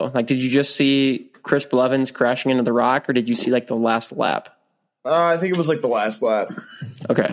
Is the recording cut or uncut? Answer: uncut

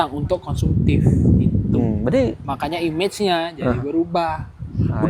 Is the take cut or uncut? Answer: uncut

